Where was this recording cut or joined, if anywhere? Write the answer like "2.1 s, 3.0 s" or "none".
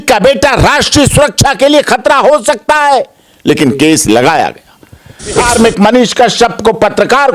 5.4 s